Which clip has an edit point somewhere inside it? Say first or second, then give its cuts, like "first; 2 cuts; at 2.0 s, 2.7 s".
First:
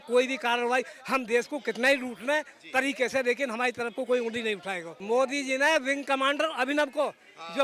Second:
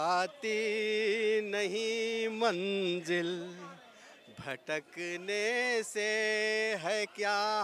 first; 1 cut; at 4.9 s